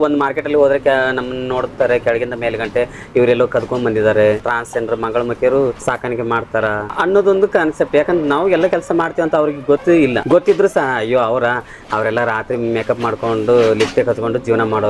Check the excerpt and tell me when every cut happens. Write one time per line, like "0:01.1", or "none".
0:04.5
0:05.8
0:06.9
0:10.1